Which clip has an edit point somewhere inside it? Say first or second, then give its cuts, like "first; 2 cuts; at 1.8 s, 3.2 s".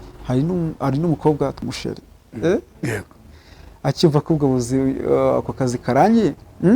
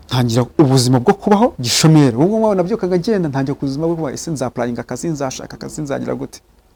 first; 1 cut; at 1.6 s